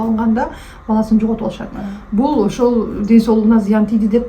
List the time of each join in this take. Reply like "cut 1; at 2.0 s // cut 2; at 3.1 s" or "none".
none